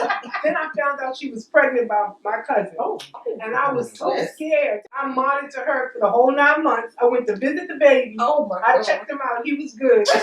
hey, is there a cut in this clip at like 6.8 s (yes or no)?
no